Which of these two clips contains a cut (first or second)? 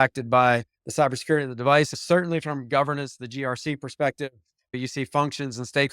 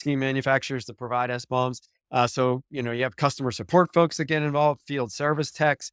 first